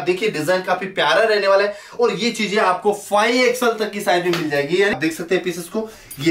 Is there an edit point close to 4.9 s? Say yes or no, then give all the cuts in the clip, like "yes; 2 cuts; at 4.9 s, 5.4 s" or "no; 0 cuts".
yes; 1 cut; at 4.9 s